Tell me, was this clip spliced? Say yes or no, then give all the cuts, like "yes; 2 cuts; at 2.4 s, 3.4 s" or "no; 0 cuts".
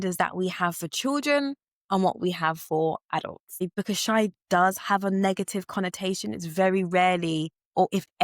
yes; 1 cut; at 3.8 s